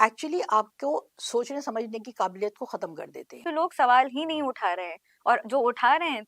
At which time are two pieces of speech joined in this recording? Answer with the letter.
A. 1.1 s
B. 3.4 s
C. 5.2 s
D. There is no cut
B